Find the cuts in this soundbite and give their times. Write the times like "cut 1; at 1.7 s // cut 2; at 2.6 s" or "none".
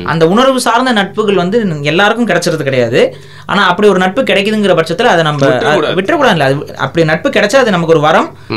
none